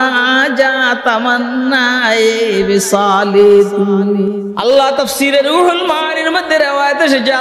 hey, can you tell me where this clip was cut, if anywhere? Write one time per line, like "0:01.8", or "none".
0:04.5